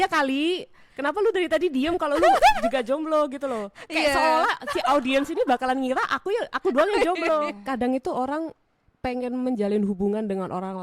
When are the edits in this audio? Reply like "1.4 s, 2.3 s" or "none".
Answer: 7.6 s